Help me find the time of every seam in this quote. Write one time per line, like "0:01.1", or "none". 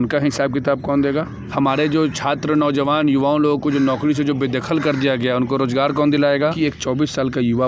0:01.4
0:06.5